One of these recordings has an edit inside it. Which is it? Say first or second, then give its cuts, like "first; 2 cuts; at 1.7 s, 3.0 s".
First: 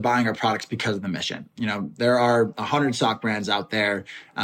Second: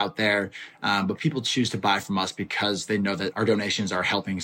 second; 1 cut; at 3.3 s